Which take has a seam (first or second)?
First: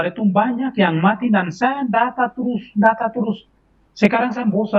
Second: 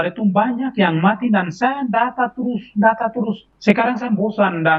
second